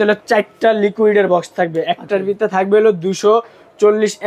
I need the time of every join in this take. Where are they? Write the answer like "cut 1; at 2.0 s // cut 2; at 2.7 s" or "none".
none

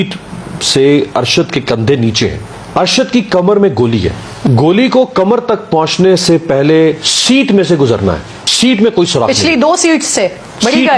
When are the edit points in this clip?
cut 1; at 2.4 s // cut 2; at 4.3 s // cut 3; at 8.4 s

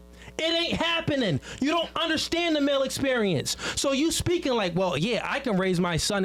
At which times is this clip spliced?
none

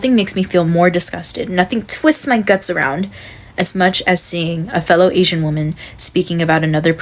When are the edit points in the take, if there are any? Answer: none

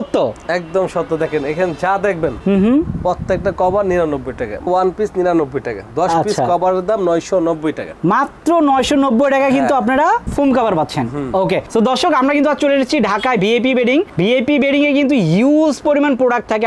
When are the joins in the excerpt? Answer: none

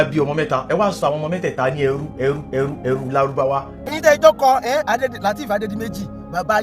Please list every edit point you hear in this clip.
cut 1; at 3.9 s

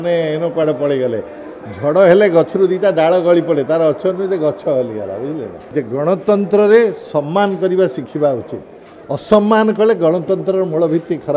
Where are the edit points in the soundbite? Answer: cut 1; at 5.6 s

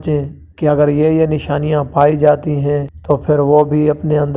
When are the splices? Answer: cut 1; at 2.9 s

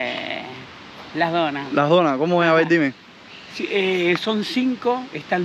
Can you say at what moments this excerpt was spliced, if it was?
none

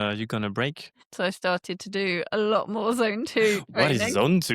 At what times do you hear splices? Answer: cut 1; at 1.0 s

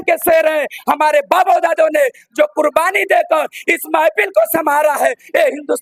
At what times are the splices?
none

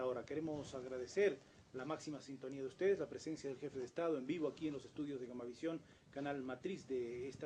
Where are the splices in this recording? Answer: none

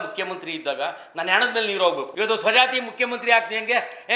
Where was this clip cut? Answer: cut 1; at 2.1 s

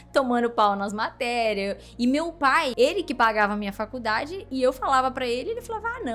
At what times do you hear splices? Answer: cut 1; at 2.7 s

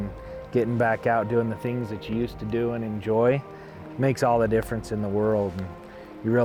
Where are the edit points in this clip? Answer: none

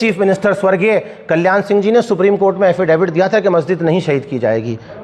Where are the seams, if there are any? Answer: none

